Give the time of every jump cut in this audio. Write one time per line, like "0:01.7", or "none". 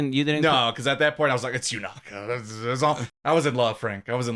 0:03.0